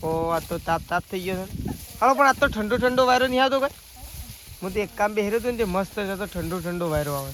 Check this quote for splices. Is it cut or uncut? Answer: uncut